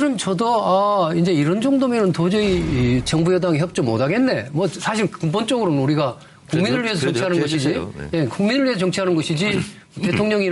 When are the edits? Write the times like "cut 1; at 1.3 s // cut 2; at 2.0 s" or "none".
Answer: none

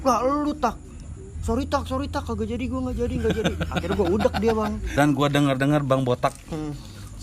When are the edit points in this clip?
cut 1; at 4.8 s

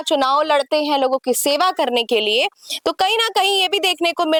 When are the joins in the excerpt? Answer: none

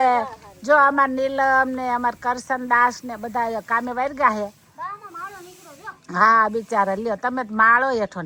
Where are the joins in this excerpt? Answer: none

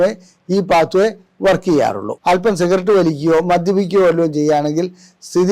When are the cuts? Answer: cut 1; at 2.1 s

